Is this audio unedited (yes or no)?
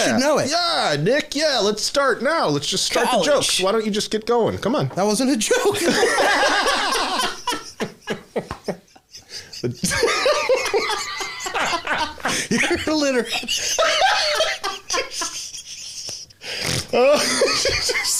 yes